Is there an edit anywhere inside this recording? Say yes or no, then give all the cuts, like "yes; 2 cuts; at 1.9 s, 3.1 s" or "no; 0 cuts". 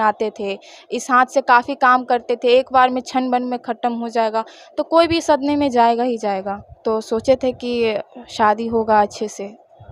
yes; 1 cut; at 6.8 s